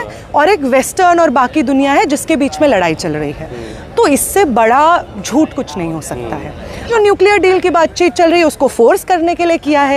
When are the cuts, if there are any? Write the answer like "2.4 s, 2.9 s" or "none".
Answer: 6.9 s